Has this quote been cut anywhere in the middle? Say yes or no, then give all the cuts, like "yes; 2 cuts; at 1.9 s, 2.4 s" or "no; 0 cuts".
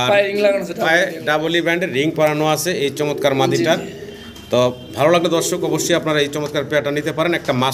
no; 0 cuts